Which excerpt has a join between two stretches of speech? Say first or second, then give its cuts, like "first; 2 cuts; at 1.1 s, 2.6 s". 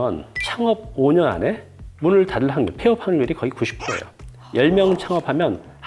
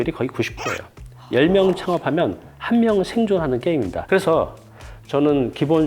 second; 1 cut; at 4.0 s